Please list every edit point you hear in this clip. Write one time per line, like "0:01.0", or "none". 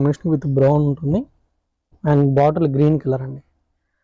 none